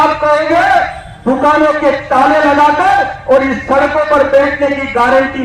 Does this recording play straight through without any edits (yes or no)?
yes